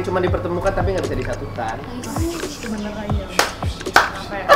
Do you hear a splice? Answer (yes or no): no